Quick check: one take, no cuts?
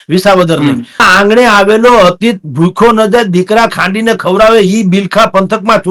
no; 1 cut; at 1.0 s

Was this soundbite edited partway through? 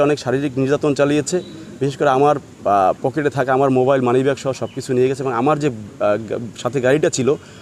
no; 0 cuts

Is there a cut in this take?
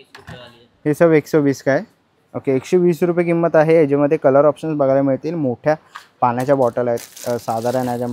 no; 0 cuts

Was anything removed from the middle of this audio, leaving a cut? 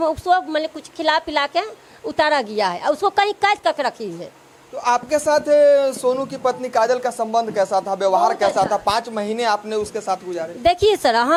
no; 0 cuts

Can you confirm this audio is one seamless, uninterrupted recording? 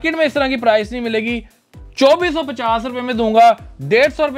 yes; 0 cuts

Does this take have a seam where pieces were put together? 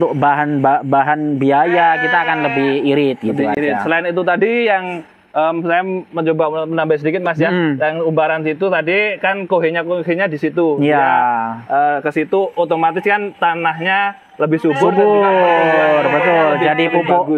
no; 0 cuts

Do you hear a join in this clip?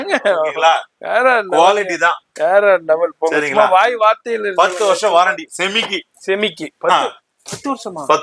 no; 0 cuts

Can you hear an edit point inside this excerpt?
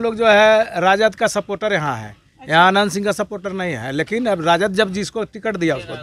no; 0 cuts

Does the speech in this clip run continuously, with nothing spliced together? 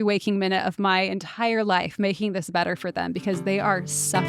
yes; 0 cuts

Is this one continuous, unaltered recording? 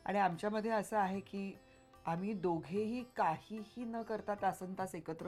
yes; 0 cuts

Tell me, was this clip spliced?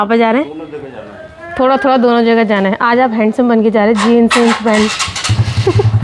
no; 0 cuts

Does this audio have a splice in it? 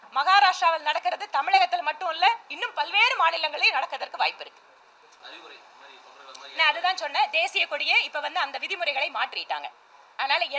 no; 0 cuts

